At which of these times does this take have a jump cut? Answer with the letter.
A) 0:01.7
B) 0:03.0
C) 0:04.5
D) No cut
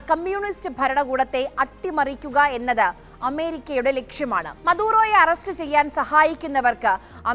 C